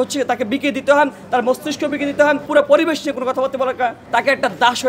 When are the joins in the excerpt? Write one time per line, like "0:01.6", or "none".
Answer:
0:02.5
0:04.0